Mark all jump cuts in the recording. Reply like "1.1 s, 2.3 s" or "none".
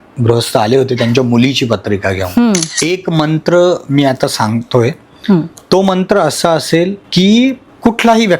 2.7 s